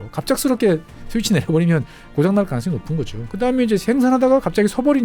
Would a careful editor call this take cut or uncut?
cut